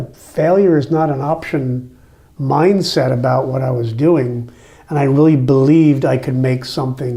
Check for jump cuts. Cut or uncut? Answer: uncut